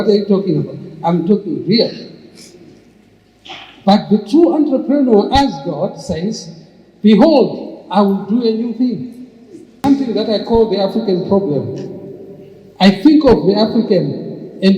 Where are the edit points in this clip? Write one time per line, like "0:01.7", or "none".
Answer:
0:09.8